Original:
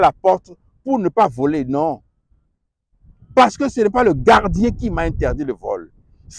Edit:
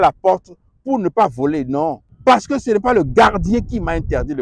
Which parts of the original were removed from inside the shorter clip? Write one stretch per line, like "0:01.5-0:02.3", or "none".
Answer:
0:02.1-0:03.2

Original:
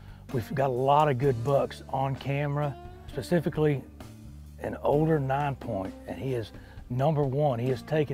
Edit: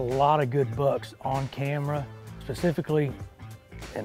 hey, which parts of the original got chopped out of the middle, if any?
none

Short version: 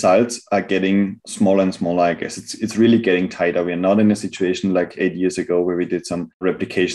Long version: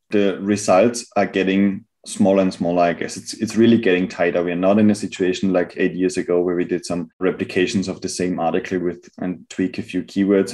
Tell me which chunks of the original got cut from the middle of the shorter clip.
0:01.9-0:02.0

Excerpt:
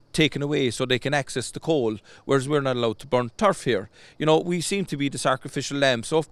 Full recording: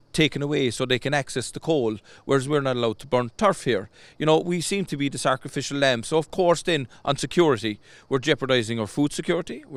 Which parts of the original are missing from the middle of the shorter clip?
none

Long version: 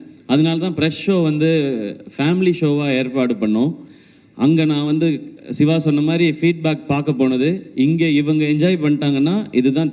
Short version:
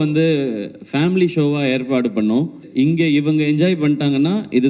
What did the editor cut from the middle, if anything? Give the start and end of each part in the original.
0:03.9-0:07.6

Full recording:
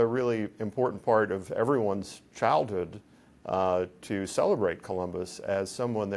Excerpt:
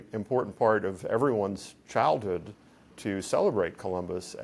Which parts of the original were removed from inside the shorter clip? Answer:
0:03.4-0:04.0

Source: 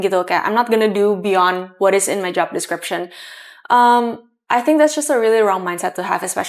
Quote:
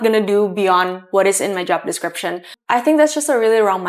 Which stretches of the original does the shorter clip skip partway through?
0:03.2-0:04.3

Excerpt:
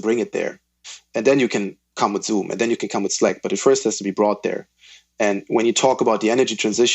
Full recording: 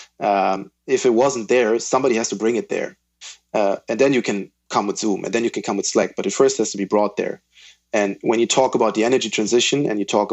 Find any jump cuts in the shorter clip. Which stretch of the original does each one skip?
0:03.4-0:03.8

